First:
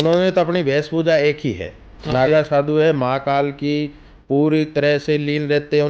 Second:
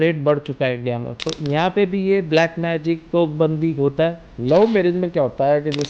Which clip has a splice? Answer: second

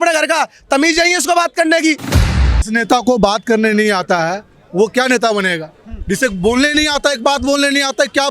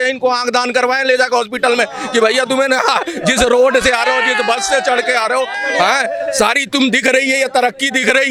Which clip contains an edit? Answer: first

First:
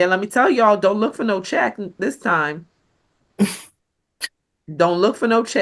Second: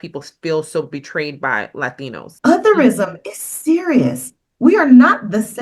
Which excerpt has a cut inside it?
second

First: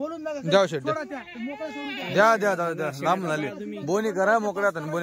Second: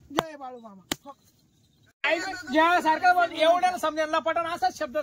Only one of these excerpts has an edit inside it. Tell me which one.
second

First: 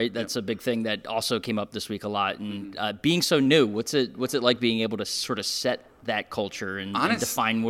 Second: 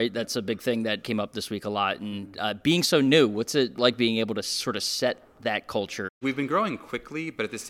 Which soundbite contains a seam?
second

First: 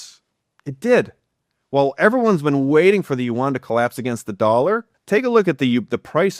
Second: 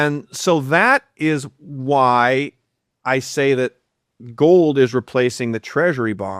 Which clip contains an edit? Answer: first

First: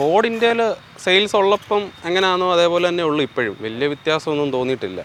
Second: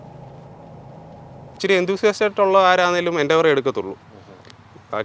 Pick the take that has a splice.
second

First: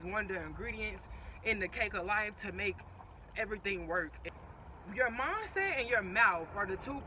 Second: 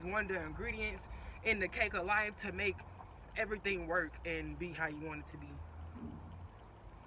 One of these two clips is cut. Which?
first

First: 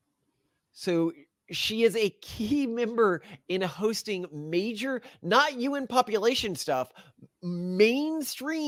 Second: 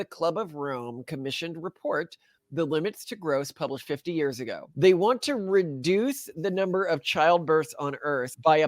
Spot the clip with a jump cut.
second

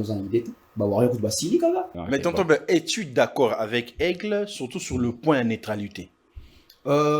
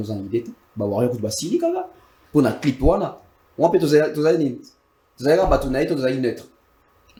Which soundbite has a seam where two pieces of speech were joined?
first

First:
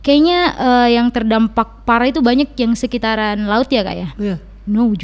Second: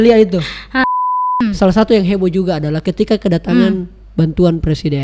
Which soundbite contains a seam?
second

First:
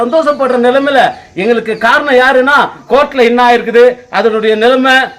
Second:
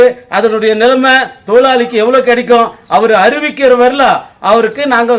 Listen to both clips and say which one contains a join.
first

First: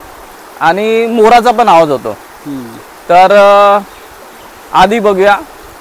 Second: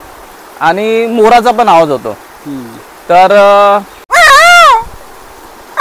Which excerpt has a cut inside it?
second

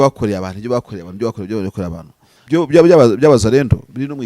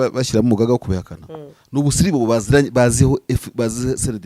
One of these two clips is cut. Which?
first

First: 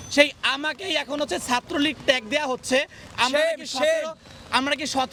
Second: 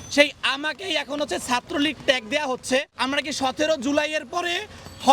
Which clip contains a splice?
second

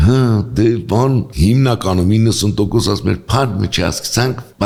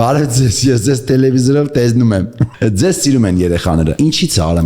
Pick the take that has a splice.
second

